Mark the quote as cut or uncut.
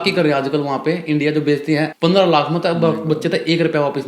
cut